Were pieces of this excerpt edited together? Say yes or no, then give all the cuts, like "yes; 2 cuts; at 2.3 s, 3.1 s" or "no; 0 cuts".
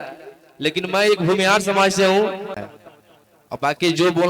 yes; 1 cut; at 2.7 s